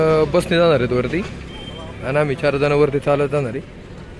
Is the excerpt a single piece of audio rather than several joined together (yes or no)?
yes